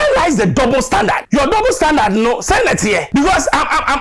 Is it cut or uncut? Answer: cut